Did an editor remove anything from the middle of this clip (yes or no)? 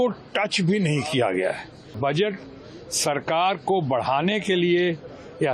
yes